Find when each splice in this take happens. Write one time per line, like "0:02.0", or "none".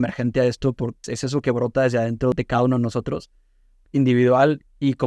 0:01.1
0:02.3